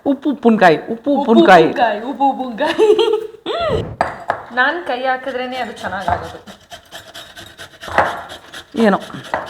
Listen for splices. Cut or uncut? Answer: cut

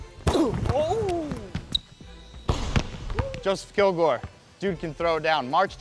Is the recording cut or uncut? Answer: cut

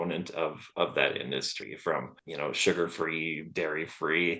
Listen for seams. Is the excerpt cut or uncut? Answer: cut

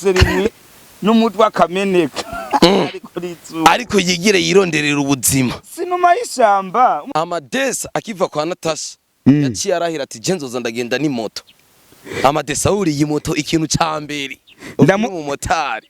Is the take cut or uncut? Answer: cut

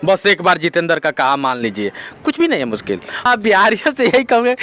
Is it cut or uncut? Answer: cut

